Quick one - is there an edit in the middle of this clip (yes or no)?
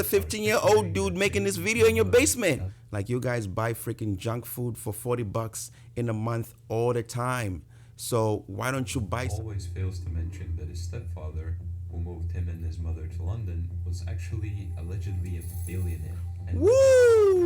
yes